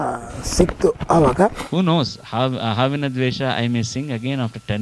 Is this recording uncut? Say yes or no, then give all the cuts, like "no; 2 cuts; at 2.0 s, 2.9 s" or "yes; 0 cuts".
no; 1 cut; at 1.6 s